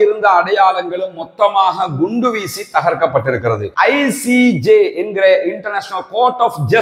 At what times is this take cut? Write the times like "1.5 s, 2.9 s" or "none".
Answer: 3.7 s